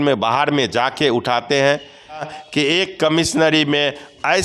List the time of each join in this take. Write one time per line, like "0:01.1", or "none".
0:02.3

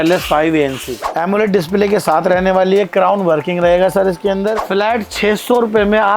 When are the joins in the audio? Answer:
0:01.0
0:04.6

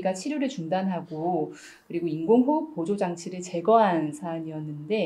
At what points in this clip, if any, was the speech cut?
none

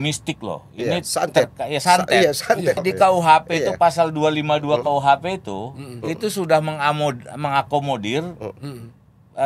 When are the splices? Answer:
0:02.8

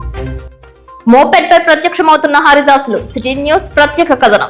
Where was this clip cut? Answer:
0:01.0

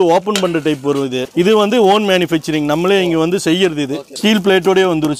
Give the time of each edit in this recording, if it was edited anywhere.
0:01.2
0:04.0

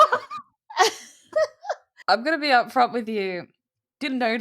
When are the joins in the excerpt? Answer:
0:01.9

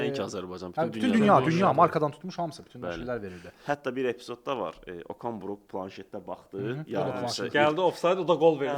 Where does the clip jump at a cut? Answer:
0:03.5

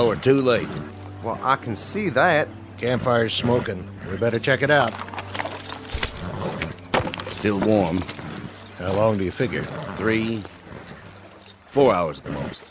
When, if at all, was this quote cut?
none

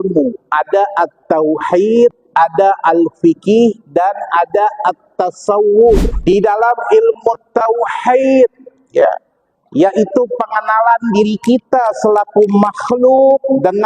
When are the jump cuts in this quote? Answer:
0:06.1

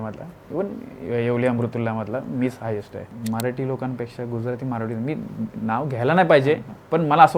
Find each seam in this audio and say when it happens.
0:03.0

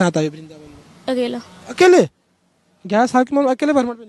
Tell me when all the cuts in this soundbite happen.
none

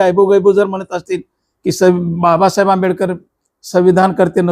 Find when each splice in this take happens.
none

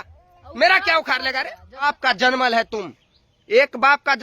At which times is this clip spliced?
0:01.9

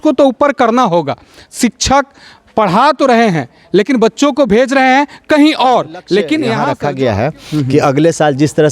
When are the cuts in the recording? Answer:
0:06.6

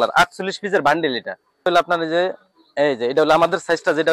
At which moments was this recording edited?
0:01.6

